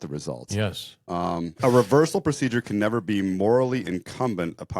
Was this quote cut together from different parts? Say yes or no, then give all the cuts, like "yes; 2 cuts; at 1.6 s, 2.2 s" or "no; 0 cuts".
yes; 1 cut; at 1.5 s